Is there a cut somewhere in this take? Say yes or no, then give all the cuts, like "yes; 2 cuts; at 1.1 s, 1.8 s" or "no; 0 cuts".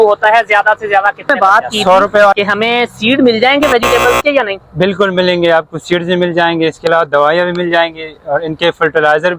yes; 1 cut; at 2.3 s